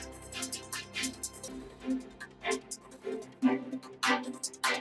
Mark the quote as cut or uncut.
cut